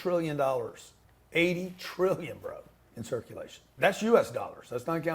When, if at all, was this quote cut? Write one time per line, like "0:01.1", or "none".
0:03.7